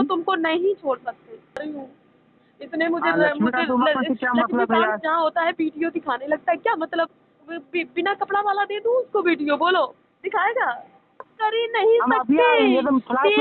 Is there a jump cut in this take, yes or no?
yes